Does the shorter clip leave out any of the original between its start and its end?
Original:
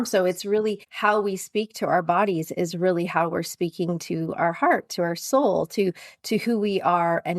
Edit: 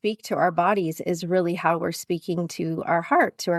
no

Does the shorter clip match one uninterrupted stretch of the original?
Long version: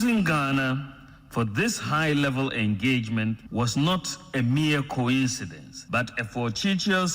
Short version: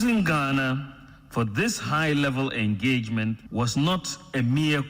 yes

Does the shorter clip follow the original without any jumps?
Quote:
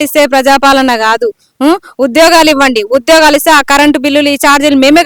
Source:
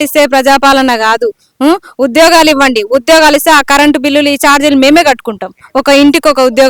yes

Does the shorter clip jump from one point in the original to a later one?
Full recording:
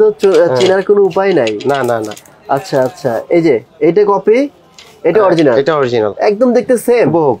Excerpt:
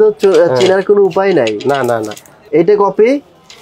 yes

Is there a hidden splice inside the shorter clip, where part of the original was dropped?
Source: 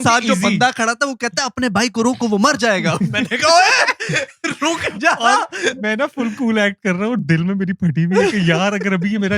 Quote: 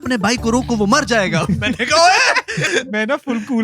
yes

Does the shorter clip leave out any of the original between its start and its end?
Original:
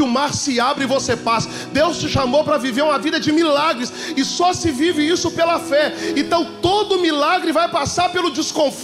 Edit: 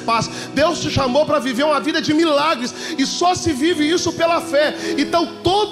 no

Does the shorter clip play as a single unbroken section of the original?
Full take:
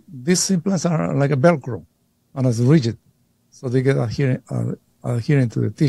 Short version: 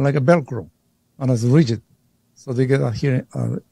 yes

